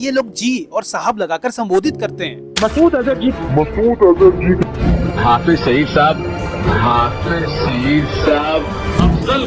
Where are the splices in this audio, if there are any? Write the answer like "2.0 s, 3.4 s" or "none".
none